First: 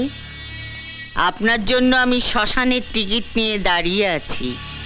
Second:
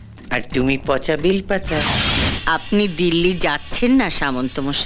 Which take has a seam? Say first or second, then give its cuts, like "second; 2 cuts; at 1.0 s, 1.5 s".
second; 1 cut; at 2.3 s